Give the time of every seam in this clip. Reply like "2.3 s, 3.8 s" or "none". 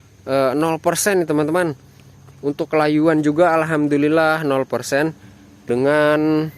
5.6 s